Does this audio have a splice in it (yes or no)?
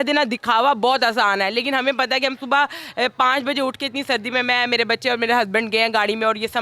no